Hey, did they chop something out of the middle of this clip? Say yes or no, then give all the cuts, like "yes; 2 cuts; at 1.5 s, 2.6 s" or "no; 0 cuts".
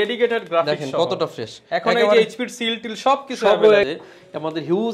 yes; 1 cut; at 3.8 s